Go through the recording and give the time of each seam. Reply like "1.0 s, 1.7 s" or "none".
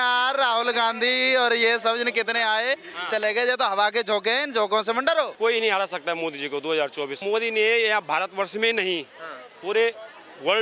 5.4 s, 7.2 s

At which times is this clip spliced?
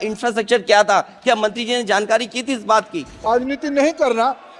3.3 s

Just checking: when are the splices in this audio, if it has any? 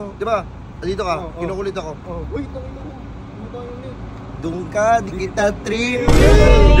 none

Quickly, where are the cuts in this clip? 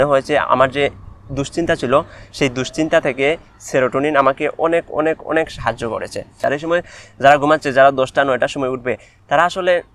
6.3 s

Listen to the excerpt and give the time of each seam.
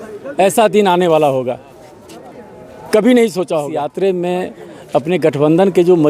3.8 s

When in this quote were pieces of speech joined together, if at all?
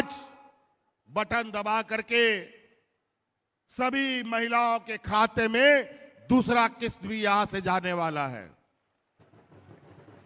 none

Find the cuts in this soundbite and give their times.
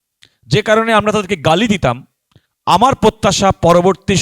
none

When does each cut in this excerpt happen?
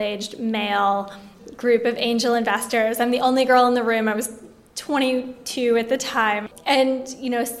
6.4 s

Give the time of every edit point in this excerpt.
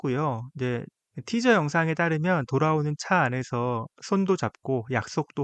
1.0 s

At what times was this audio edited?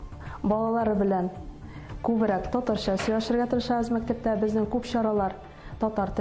none

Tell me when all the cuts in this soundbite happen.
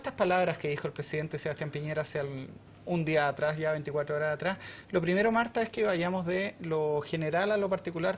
4.2 s

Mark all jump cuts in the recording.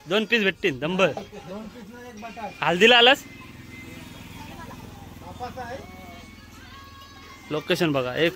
none

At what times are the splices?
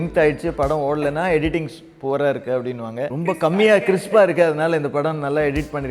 3.1 s

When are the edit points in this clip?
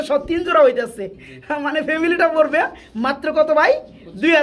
none

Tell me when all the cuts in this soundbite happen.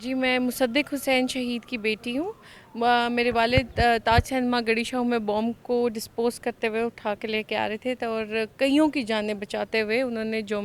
none

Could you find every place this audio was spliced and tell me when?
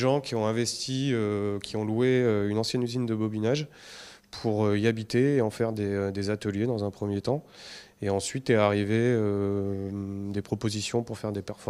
8.3 s

